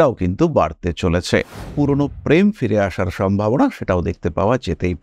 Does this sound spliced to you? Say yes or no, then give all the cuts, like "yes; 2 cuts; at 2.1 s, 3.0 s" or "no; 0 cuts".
yes; 1 cut; at 1.7 s